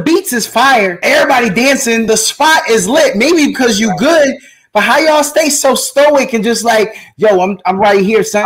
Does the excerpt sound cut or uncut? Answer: cut